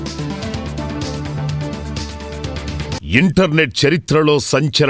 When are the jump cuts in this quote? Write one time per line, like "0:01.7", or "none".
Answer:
0:03.0